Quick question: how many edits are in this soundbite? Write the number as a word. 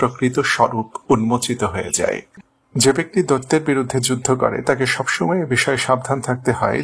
one